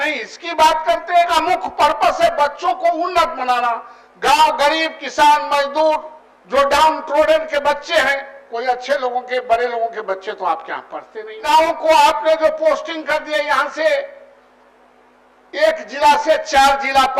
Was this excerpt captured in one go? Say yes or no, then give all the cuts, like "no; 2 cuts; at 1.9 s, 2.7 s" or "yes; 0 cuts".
no; 2 cuts; at 1.3 s, 11.4 s